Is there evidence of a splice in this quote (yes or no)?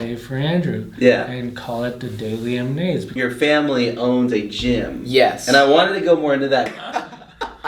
yes